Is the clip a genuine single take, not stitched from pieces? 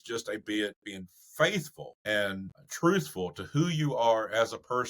no; 1 cut; at 2.4 s

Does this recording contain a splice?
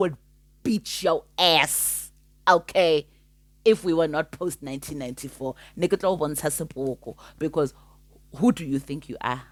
no; 0 cuts

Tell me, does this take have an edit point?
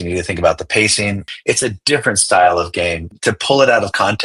yes; 2 cuts; at 1.2 s, 3.1 s

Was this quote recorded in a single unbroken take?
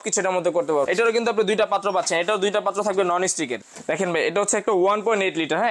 no; 2 cuts; at 0.9 s, 3.6 s

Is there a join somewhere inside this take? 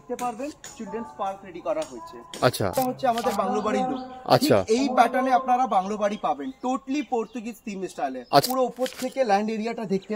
yes; 2 cuts; at 2.7 s, 8.4 s

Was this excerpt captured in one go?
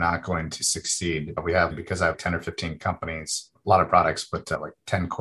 no; 2 cuts; at 2.0 s, 3.4 s

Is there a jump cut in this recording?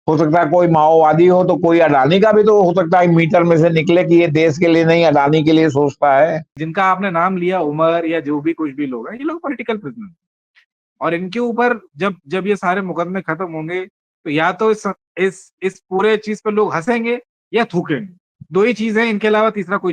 yes; 1 cut; at 6.6 s

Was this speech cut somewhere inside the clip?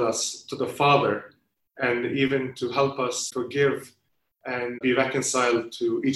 yes; 2 cuts; at 3.3 s, 4.8 s

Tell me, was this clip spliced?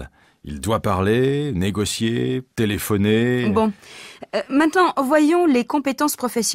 yes; 1 cut; at 3.3 s

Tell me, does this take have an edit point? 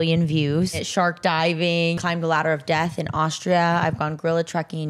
yes; 2 cuts; at 0.8 s, 2.0 s

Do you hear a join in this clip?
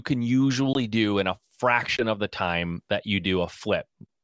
no; 0 cuts

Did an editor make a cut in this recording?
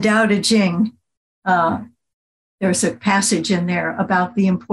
no; 0 cuts

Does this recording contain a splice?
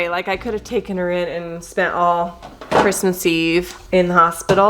yes; 1 cut; at 3.8 s

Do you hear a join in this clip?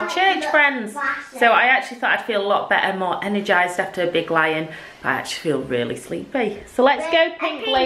no; 0 cuts

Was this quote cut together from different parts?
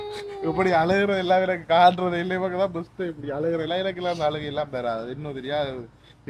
no; 0 cuts

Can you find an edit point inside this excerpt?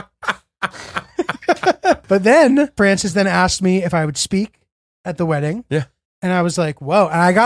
yes; 2 cuts; at 2.0 s, 2.7 s

